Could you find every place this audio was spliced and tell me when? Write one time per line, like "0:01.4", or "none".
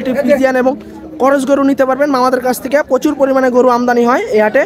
none